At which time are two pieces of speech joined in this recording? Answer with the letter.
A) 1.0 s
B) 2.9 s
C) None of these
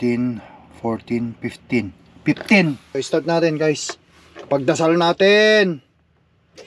B